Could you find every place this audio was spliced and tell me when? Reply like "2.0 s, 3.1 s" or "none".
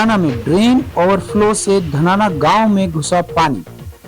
none